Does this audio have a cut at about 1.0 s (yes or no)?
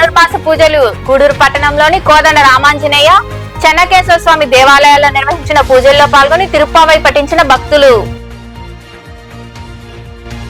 no